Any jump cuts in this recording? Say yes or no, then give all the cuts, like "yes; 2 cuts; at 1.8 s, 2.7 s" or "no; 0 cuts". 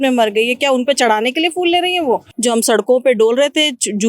yes; 1 cut; at 2.3 s